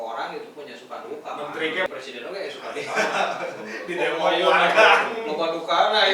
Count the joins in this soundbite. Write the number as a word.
one